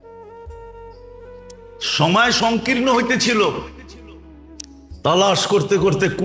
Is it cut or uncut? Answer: cut